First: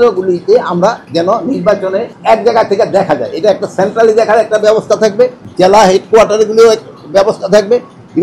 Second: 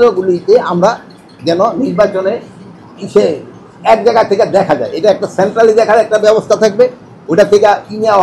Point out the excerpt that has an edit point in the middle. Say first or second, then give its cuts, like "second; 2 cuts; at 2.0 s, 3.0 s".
first; 3 cuts; at 1.0 s, 2.1 s, 5.4 s